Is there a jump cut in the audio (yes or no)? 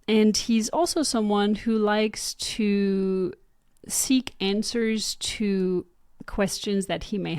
no